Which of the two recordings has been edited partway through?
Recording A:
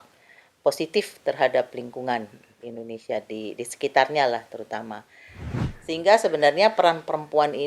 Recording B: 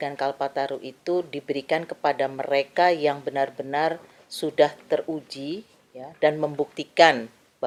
A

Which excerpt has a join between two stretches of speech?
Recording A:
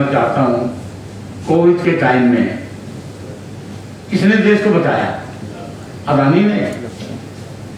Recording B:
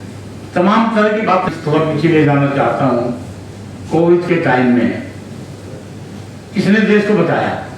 B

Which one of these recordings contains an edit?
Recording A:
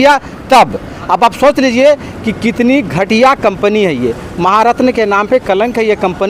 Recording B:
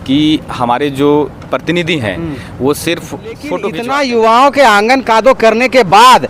B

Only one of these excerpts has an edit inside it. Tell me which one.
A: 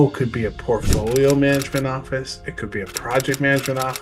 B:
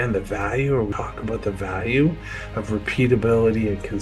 B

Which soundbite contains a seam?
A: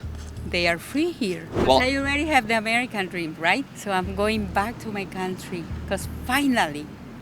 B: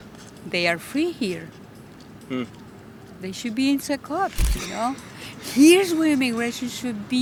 A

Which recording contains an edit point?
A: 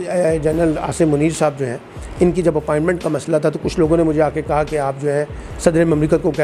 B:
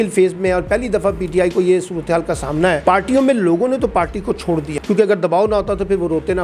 B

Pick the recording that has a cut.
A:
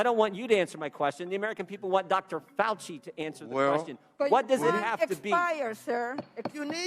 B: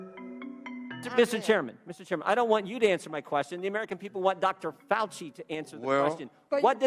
B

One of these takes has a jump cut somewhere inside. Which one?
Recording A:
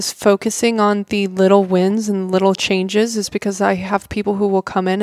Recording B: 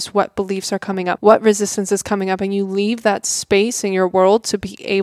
B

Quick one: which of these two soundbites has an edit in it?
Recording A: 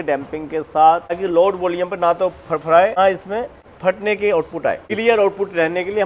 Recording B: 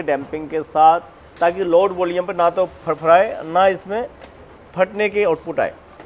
A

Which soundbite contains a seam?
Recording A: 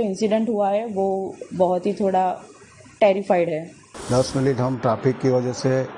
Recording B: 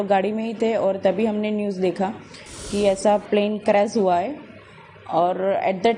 A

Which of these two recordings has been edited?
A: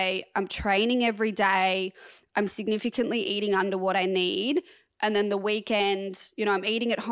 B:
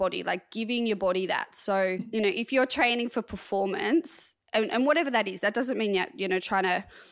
B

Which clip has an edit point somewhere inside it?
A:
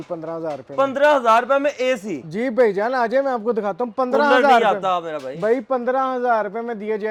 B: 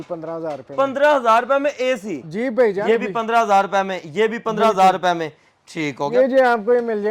B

